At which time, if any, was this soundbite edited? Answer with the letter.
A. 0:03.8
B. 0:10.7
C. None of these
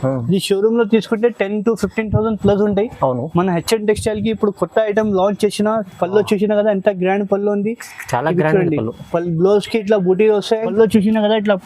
B